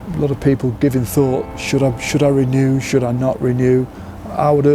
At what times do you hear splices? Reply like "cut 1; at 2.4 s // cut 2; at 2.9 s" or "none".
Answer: cut 1; at 1.6 s